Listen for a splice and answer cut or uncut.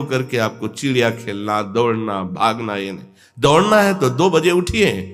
uncut